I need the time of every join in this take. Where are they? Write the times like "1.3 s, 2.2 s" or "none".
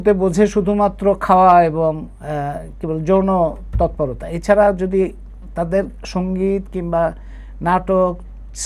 none